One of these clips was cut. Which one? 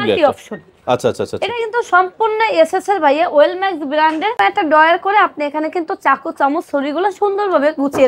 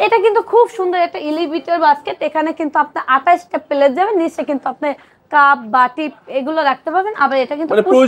first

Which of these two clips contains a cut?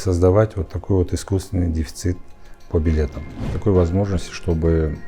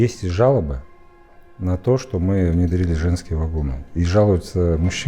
first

